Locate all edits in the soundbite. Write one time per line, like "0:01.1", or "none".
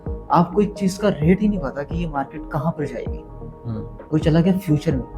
none